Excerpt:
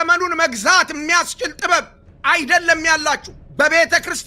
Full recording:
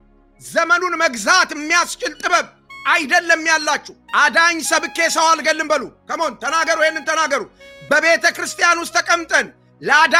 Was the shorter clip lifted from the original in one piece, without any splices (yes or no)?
no